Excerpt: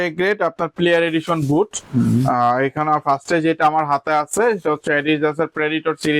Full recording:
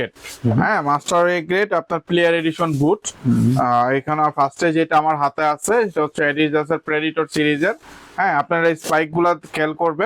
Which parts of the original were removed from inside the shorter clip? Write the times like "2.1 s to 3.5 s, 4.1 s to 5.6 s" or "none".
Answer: none

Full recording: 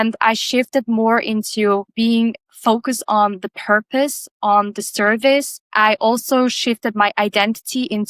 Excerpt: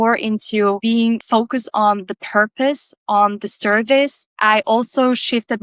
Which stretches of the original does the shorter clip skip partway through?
2.2 s to 2.5 s

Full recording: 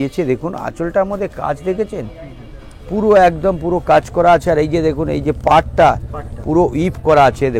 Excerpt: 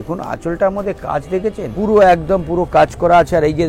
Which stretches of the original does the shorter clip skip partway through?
2.0 s to 2.8 s

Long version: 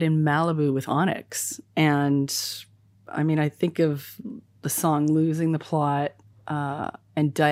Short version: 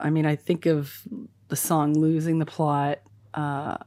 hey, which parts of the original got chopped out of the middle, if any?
none

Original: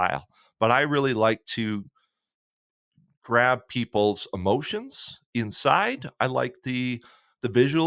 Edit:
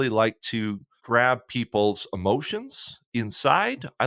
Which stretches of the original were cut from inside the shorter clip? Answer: 1.9 s to 3.1 s

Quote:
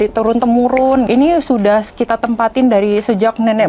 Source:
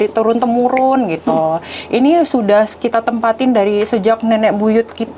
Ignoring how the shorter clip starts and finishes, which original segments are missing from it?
1.1 s to 1.9 s

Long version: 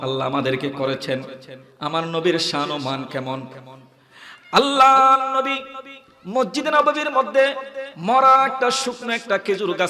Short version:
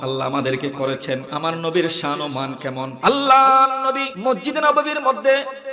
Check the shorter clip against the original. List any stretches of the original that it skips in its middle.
1.3 s to 1.8 s, 3.4 s to 4.4 s, 5.6 s to 6.2 s

